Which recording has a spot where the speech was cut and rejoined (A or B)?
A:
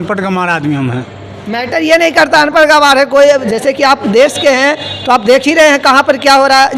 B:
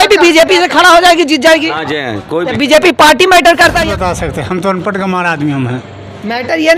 B